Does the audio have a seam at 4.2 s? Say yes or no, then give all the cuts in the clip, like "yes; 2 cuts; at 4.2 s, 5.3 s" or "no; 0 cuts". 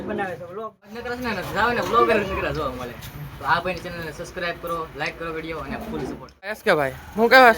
no; 2 cuts; at 1.0 s, 6.6 s